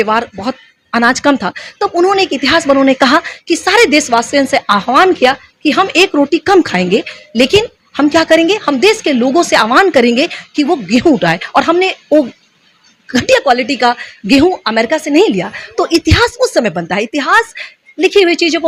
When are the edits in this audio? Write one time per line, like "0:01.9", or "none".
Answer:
none